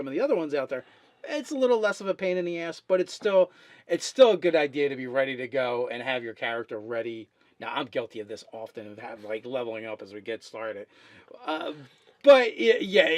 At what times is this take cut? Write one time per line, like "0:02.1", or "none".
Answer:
0:05.4